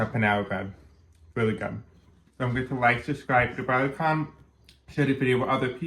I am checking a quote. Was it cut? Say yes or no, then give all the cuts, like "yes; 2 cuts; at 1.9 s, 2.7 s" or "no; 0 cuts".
yes; 1 cut; at 2.2 s